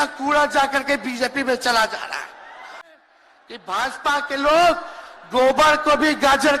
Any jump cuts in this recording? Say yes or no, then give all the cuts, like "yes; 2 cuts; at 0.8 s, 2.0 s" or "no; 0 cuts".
yes; 1 cut; at 3.0 s